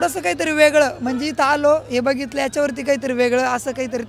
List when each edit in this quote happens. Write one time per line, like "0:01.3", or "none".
none